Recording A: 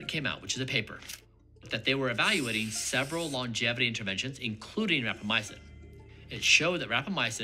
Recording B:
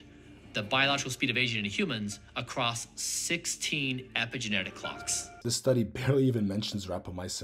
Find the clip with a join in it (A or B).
B